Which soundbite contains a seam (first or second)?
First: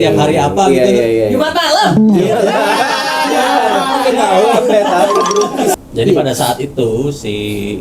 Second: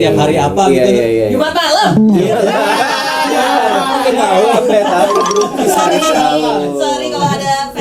first